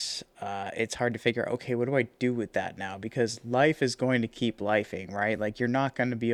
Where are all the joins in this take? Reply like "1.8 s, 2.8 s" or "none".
none